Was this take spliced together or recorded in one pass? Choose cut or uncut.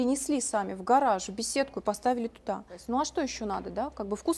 cut